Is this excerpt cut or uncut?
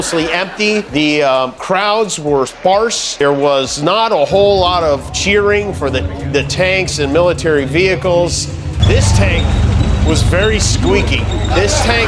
cut